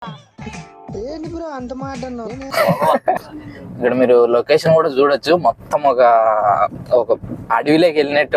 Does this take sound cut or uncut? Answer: cut